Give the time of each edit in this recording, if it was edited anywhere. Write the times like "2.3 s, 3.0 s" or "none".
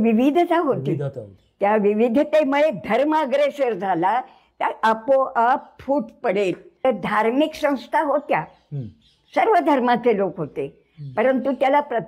6.8 s

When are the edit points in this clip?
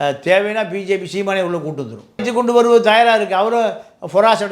2.2 s

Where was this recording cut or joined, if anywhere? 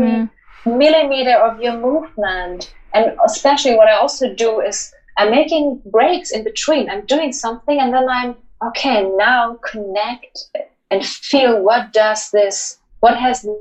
none

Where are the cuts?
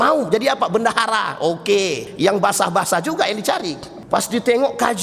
2.1 s, 3.9 s

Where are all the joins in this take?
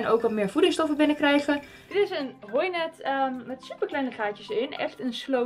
1.7 s

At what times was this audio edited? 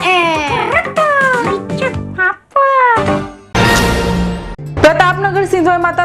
3.4 s

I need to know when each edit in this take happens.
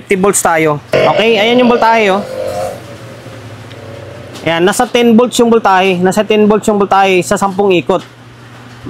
0.9 s

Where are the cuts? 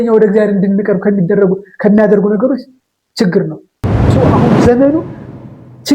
4.1 s

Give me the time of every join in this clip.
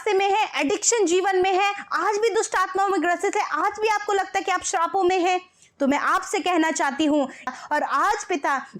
7.5 s

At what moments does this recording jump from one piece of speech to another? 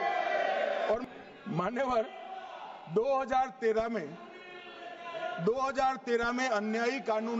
1.0 s

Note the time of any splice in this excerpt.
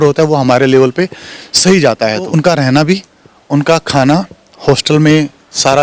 2.3 s

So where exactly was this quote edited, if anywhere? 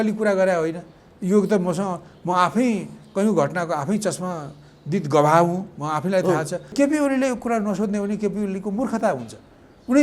6.7 s

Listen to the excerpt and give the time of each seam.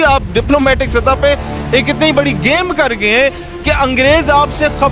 none

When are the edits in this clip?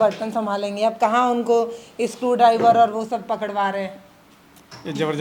none

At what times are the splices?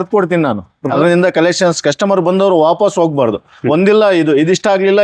0.9 s

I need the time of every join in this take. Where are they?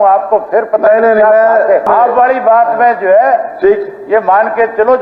1.9 s

